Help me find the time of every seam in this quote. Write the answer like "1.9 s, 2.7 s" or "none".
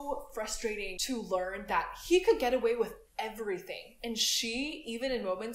0.9 s

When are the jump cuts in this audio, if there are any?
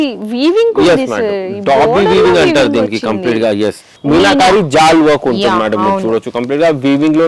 3.9 s

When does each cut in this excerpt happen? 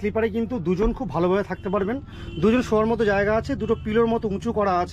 none

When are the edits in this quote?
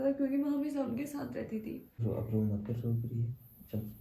2.0 s

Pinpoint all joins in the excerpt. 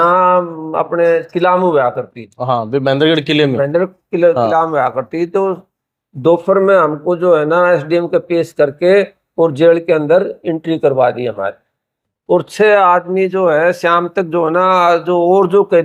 none

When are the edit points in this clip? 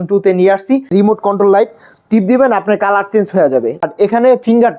0.9 s, 3.9 s

